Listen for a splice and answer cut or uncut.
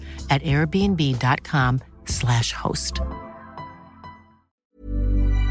cut